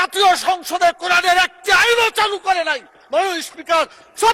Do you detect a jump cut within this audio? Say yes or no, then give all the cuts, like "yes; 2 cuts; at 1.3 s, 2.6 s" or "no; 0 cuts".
no; 0 cuts